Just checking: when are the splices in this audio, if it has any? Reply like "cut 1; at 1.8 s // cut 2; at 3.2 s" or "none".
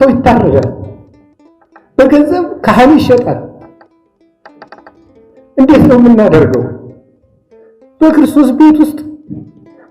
none